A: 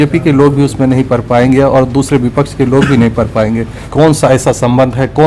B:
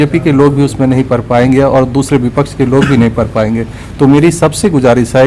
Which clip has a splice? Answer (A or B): A